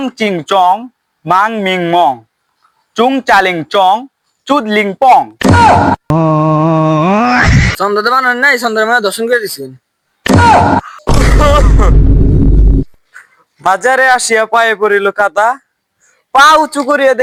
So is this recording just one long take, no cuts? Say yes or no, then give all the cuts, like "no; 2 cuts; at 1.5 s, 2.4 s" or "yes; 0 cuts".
yes; 0 cuts